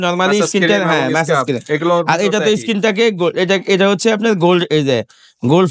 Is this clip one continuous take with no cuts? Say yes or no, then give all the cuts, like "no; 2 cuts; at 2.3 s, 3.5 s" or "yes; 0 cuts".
yes; 0 cuts